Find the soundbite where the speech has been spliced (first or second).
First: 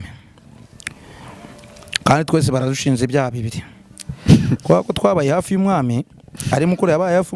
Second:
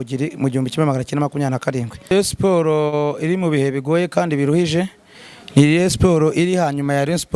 second